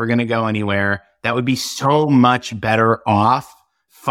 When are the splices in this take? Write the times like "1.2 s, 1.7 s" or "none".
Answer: none